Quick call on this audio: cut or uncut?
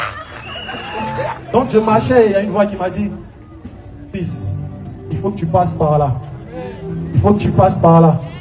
cut